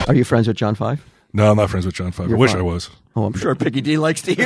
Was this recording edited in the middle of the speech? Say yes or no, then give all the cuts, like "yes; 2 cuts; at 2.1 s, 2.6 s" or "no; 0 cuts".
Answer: yes; 1 cut; at 3.4 s